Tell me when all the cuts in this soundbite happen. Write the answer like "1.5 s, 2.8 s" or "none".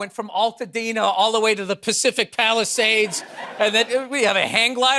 none